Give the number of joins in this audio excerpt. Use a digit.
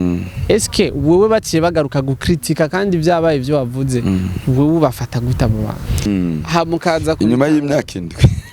1